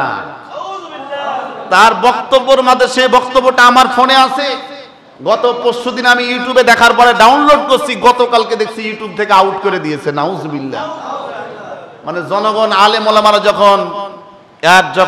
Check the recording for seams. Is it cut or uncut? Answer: uncut